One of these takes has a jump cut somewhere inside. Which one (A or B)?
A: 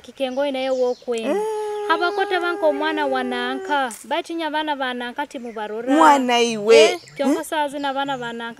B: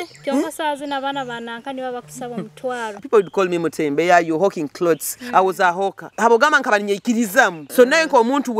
B